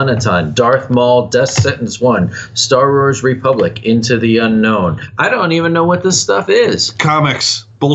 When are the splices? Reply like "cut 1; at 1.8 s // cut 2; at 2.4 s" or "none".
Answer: cut 1; at 5.1 s